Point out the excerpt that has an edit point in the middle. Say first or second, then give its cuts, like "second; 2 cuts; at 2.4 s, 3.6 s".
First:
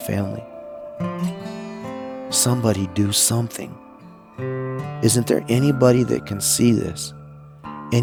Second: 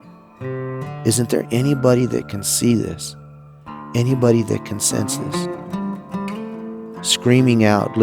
second; 2 cuts; at 5.5 s, 6.9 s